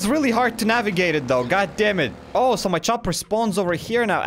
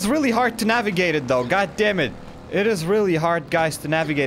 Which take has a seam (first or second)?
first